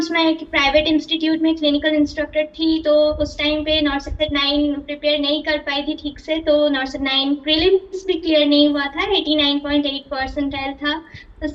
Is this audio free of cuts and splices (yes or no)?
yes